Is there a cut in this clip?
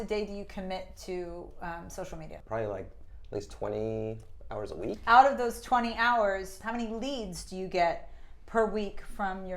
yes; 3 cuts; at 2.4 s, 5.0 s, 6.5 s

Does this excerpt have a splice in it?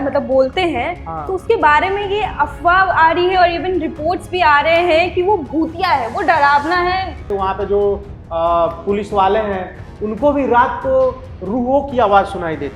yes; 1 cut; at 7.3 s

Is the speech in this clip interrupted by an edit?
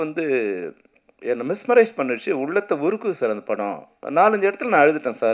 no; 0 cuts

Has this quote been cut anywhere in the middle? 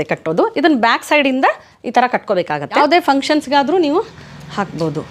yes; 1 cut; at 2.8 s

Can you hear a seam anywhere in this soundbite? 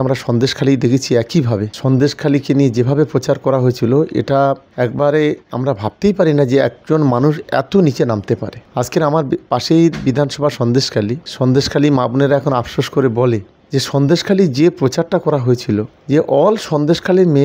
no; 0 cuts

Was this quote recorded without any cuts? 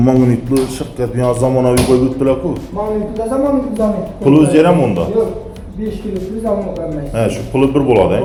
yes; 0 cuts

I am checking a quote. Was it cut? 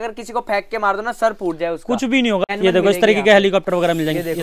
yes; 1 cut; at 2.5 s

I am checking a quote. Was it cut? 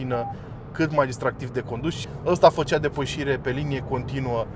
yes; 1 cut; at 2.1 s

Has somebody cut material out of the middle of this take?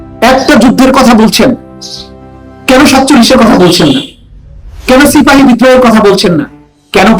no; 0 cuts

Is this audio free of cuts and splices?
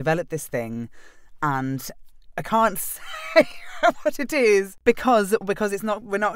no; 1 cut; at 4.7 s

